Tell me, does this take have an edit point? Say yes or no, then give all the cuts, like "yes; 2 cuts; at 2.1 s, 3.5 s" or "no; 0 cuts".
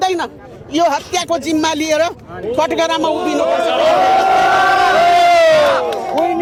no; 0 cuts